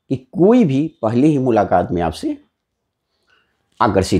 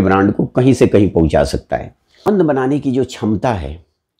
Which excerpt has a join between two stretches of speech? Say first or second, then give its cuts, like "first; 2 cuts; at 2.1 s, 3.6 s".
second; 1 cut; at 2.2 s